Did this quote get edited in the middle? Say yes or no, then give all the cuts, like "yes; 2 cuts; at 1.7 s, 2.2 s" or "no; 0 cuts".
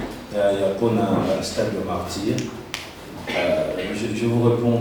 no; 0 cuts